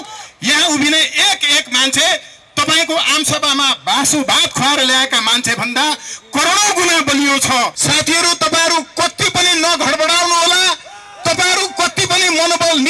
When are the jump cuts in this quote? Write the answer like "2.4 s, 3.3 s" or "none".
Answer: 7.8 s